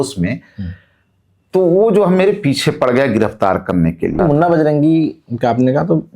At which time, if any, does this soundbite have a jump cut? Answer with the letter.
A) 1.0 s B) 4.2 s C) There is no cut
B